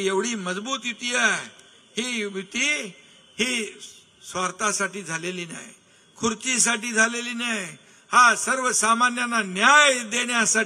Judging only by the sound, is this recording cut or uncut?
uncut